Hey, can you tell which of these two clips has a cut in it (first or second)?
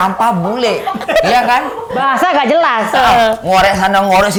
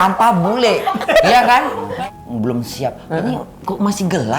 second